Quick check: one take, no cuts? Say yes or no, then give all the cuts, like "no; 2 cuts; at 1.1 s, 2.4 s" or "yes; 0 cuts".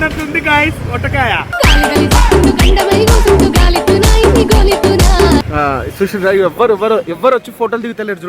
yes; 0 cuts